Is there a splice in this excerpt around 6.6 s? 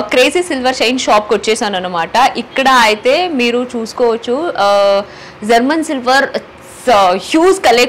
no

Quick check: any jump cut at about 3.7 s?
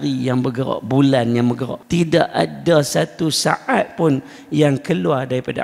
no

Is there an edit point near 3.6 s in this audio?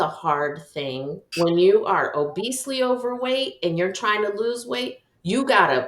no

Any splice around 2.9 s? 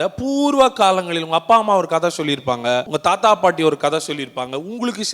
yes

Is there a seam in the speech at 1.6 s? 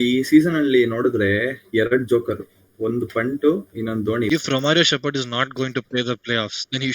no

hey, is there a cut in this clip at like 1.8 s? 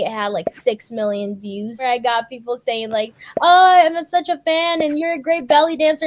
yes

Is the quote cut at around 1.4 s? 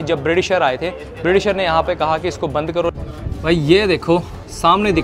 no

